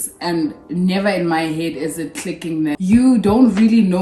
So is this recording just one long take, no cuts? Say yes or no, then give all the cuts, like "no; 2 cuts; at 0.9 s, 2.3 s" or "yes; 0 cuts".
no; 1 cut; at 2.8 s